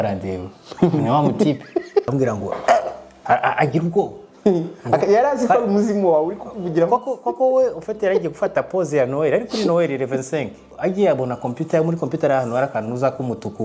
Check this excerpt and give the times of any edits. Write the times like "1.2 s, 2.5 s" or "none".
2.1 s, 10.7 s

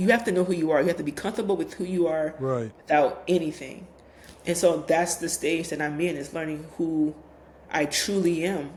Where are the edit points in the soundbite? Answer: none

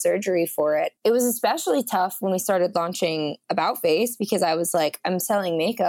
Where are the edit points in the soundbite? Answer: 0.9 s

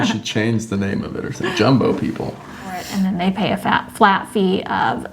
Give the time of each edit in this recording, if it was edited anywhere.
2.8 s

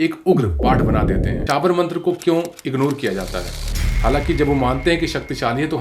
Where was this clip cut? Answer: 1.4 s

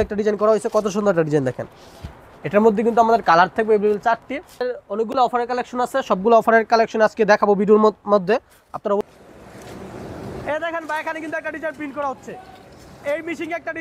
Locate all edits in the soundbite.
4.6 s, 9.0 s

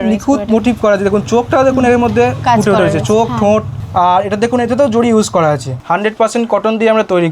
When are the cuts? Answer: 3.8 s, 5.7 s

